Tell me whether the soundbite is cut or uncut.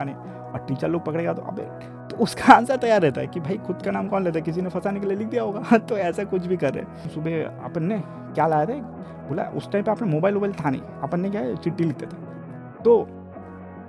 cut